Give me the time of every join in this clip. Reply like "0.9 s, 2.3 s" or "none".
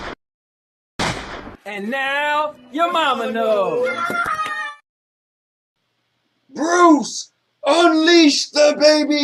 1.1 s